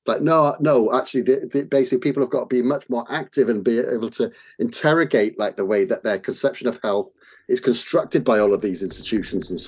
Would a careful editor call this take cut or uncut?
uncut